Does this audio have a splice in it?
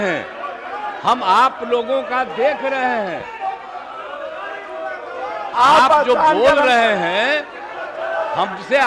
no; 0 cuts

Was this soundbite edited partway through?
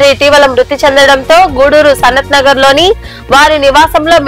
no; 0 cuts

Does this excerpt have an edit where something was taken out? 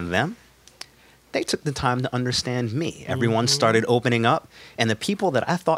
no; 0 cuts

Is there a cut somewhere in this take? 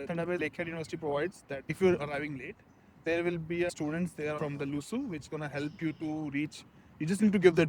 no; 0 cuts

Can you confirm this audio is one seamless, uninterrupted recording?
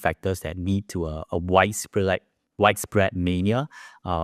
yes; 0 cuts

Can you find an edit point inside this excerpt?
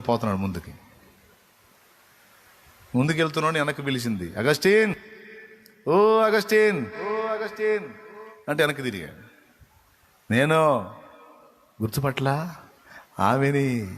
no; 0 cuts

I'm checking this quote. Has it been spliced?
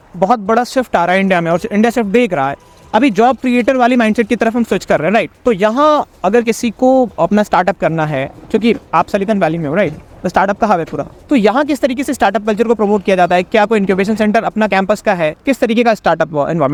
no; 0 cuts

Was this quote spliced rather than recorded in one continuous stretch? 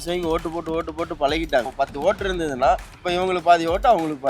yes; 2 cuts; at 1.7 s, 2.9 s

